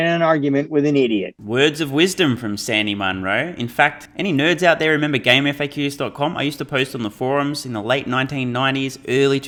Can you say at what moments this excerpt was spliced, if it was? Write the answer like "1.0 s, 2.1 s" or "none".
none